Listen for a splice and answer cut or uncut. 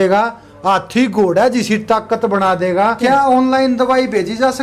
cut